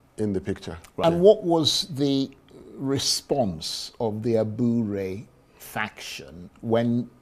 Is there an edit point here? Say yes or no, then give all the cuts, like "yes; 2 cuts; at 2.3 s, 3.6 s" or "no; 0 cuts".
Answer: yes; 1 cut; at 1.0 s